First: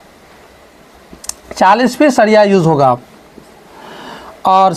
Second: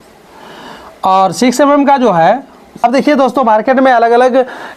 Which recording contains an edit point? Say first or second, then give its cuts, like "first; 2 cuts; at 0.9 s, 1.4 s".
second; 1 cut; at 2.8 s